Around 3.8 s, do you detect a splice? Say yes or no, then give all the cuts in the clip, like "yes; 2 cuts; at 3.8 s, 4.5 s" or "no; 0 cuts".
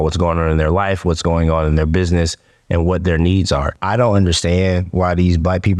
yes; 1 cut; at 3.8 s